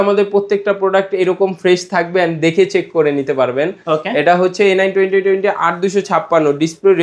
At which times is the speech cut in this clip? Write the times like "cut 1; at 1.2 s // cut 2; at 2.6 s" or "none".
none